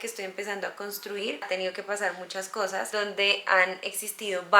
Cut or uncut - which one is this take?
cut